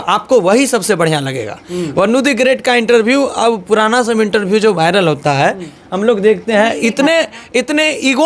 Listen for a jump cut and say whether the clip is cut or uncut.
uncut